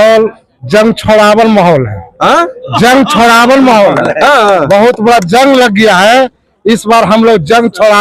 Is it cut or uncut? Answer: uncut